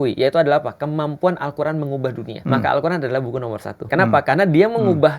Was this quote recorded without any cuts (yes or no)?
no